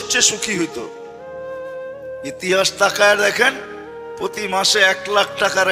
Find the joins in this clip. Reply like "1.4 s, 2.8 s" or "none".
none